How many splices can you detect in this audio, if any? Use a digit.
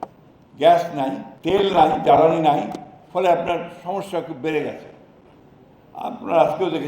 1